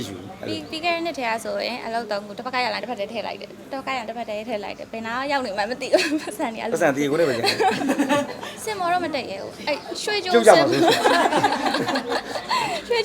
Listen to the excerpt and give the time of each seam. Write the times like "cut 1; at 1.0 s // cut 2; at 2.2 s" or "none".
cut 1; at 8.5 s